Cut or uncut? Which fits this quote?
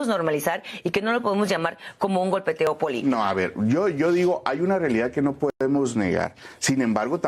cut